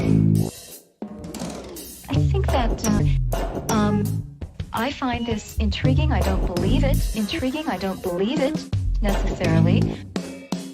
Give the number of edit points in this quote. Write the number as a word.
one